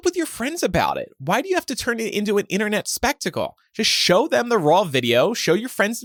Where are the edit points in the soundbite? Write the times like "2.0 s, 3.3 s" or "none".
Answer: none